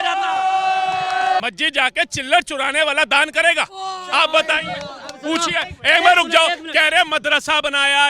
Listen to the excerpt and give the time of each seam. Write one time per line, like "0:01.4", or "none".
0:01.4